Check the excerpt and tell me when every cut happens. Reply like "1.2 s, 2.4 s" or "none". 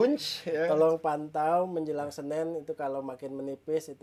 none